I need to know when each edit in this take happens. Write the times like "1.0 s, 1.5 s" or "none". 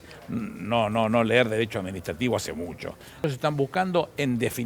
3.2 s